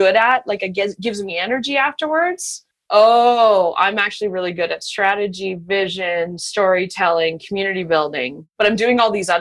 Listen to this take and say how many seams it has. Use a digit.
2